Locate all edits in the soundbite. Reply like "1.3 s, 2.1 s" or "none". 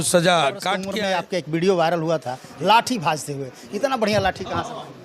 0.9 s